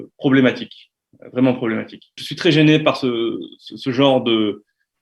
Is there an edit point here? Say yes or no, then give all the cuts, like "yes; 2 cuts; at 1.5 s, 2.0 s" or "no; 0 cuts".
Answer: yes; 1 cut; at 2.2 s